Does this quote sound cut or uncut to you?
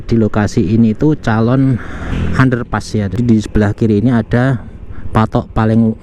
cut